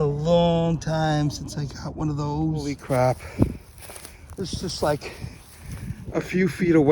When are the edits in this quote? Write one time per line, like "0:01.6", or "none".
0:02.8